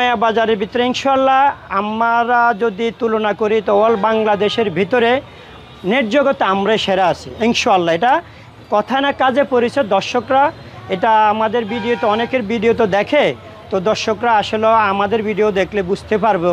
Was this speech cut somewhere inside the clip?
no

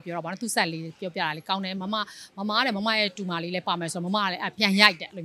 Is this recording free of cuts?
yes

